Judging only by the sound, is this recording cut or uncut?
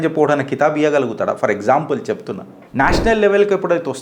cut